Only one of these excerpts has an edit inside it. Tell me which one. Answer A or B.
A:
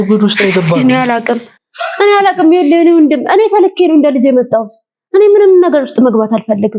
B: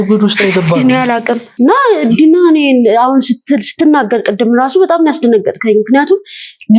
B